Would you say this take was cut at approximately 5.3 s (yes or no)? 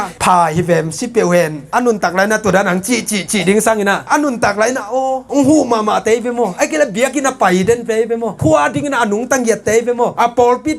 no